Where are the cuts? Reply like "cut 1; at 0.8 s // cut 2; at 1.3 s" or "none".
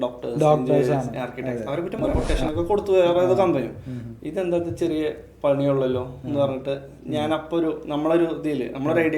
cut 1; at 2.2 s

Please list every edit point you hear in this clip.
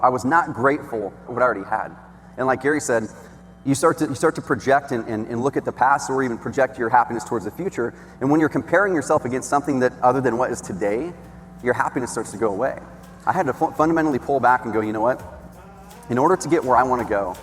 cut 1; at 1.3 s // cut 2; at 13.1 s

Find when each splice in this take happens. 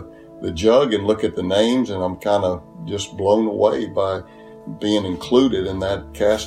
none

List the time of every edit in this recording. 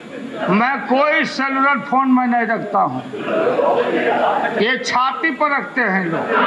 none

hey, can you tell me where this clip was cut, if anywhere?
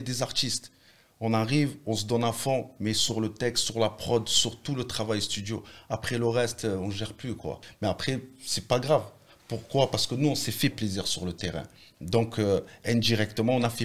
cut 1; at 7.6 s

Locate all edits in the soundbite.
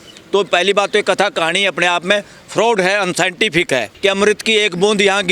cut 1; at 3.9 s

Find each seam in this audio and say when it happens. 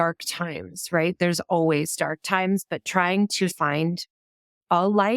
cut 1; at 2.2 s // cut 2; at 3.6 s

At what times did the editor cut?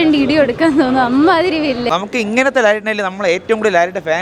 cut 1; at 1.9 s

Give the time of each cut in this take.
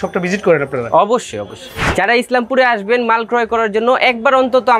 cut 1; at 1.8 s

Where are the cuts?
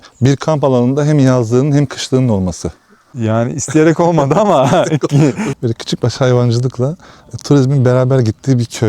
cut 1; at 5.4 s

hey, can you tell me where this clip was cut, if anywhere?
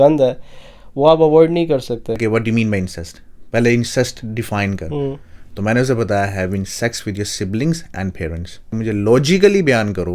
cut 1; at 2.2 s // cut 2; at 8.7 s

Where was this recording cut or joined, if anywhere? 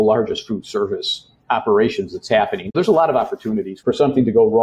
cut 1; at 2.6 s // cut 2; at 3.7 s

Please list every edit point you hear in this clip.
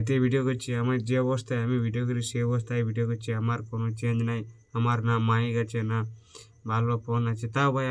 none

